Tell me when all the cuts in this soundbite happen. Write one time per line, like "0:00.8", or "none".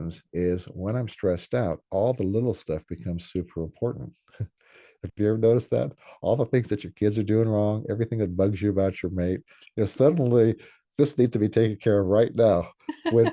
none